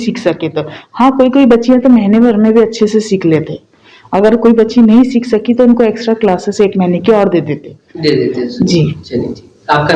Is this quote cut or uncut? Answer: uncut